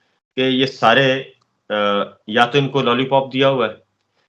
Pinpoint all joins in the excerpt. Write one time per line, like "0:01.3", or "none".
none

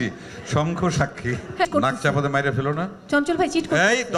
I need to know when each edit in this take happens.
0:01.7

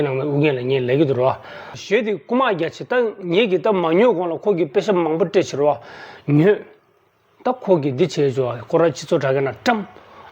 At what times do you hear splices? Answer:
0:01.8

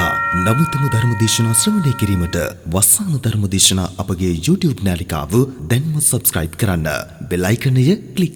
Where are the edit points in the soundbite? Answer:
none

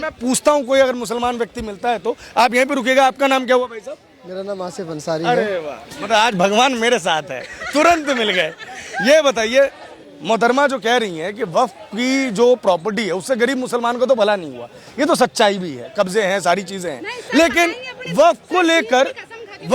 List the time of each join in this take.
none

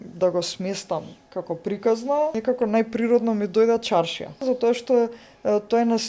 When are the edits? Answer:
0:02.4
0:04.4

